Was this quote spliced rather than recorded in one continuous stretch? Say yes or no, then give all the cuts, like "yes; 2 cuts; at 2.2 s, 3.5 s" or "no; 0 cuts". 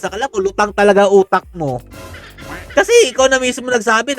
no; 0 cuts